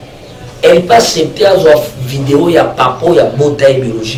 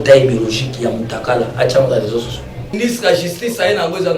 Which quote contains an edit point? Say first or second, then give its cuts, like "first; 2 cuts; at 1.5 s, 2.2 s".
second; 1 cut; at 2.7 s